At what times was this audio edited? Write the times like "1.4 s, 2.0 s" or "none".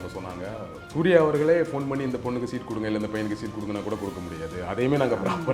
none